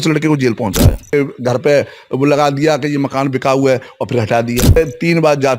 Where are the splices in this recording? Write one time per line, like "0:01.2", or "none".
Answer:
0:01.1
0:04.8